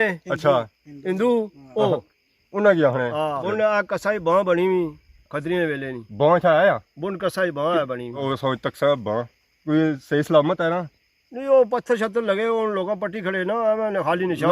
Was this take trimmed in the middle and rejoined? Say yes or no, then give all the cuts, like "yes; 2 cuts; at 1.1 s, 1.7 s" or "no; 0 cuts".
yes; 2 cuts; at 3.4 s, 8.2 s